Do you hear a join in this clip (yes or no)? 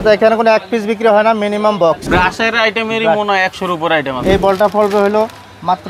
yes